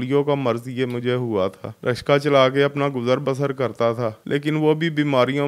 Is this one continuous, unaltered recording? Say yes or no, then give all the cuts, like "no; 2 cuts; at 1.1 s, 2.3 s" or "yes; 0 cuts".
no; 2 cuts; at 1.7 s, 4.2 s